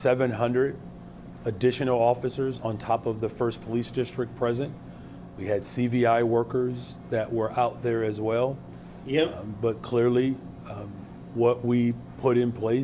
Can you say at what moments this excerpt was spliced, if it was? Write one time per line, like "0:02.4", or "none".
none